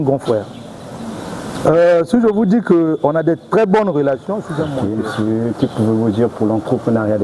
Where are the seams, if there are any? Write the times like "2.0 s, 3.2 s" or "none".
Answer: 4.8 s